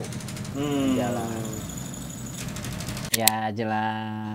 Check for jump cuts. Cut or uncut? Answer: cut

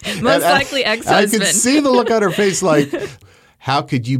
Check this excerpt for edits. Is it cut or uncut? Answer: cut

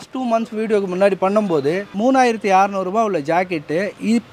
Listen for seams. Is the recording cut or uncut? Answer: cut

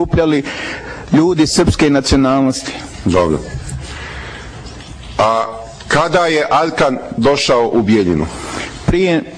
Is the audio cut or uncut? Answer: cut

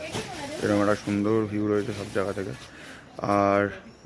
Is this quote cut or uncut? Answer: uncut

